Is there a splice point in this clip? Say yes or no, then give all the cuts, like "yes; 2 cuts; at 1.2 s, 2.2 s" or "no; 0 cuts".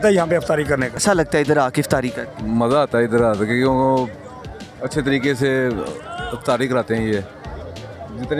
yes; 1 cut; at 1.0 s